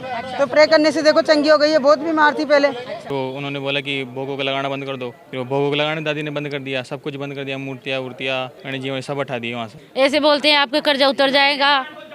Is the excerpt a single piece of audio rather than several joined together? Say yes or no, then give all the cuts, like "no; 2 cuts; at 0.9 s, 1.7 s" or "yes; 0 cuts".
no; 4 cuts; at 3.0 s, 5.2 s, 8.6 s, 9.8 s